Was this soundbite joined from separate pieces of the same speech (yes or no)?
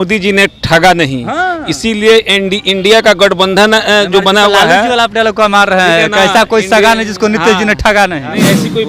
no